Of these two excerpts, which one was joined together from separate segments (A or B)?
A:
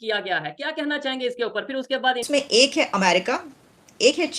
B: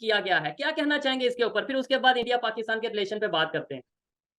A